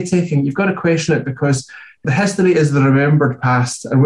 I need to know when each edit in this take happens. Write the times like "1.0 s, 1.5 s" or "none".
2.0 s